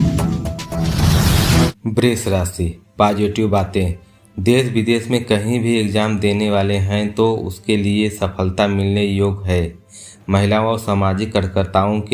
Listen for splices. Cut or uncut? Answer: cut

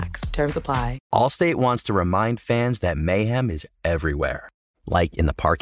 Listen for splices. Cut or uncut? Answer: cut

